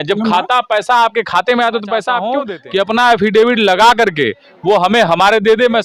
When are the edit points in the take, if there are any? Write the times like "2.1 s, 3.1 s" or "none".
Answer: 2.3 s